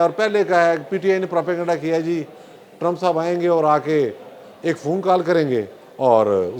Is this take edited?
no; 0 cuts

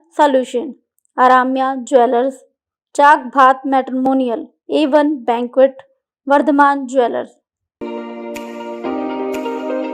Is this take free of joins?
no; 1 cut; at 7.7 s

